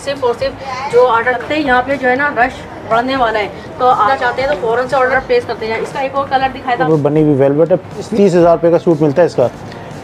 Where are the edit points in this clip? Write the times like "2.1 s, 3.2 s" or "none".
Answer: 1.4 s, 4.1 s, 5.1 s, 6.8 s, 8.1 s